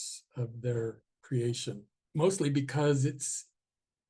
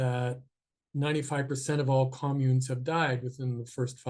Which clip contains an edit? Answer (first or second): first